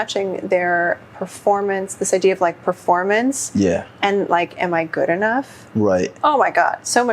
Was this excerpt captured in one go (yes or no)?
no